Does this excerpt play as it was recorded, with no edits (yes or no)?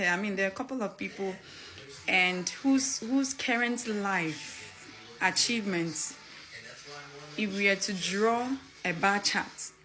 yes